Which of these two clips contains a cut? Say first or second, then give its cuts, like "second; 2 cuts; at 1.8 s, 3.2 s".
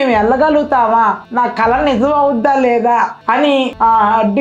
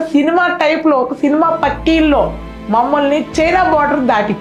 first; 2 cuts; at 1.2 s, 3.4 s